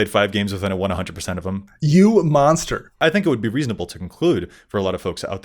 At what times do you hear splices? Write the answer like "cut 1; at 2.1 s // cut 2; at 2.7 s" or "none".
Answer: cut 1; at 1.7 s // cut 2; at 2.6 s